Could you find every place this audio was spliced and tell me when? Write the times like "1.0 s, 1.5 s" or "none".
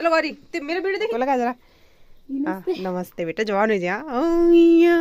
1.1 s